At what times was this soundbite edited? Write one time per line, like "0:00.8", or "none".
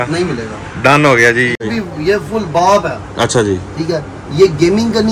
0:01.6